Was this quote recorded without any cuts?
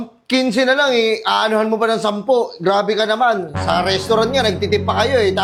yes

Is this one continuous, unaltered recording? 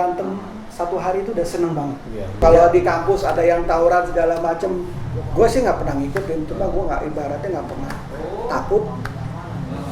no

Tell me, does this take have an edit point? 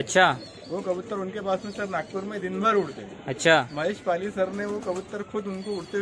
no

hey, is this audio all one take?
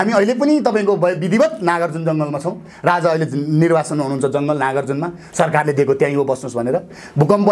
yes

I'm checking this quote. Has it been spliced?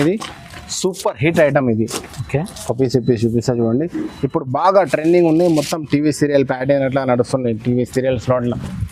no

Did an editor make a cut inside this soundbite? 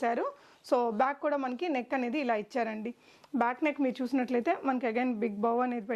no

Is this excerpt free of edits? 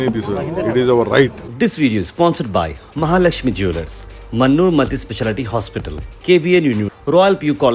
no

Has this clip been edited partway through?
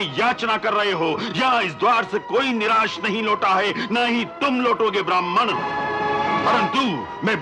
no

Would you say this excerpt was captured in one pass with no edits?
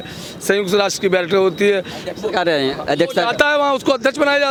yes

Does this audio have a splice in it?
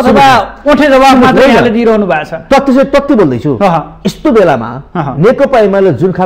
no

